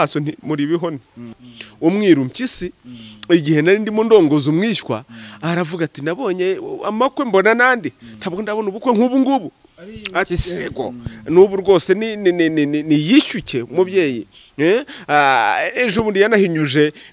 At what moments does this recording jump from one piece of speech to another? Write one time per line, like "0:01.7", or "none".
0:01.5

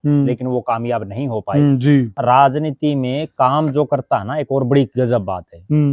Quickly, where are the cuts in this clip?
0:02.1

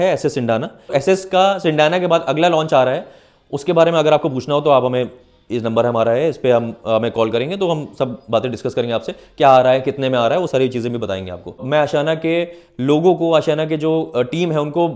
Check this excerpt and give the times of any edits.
0:00.9
0:11.6

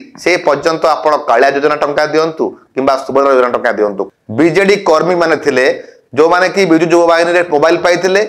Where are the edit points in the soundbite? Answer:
0:04.0

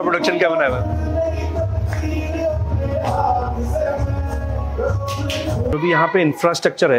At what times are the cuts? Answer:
0:05.7

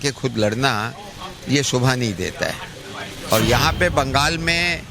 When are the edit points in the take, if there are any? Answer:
0:03.2

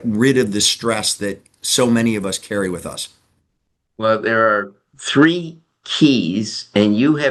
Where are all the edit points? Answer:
none

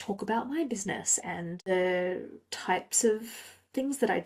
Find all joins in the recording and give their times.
0:01.7

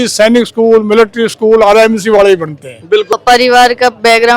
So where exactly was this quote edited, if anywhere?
0:03.1

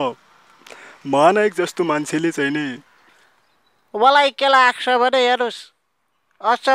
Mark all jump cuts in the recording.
0:02.9

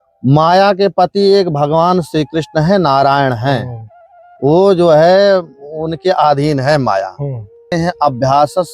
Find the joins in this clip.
0:07.7

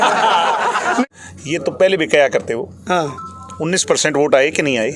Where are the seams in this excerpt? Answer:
0:01.0

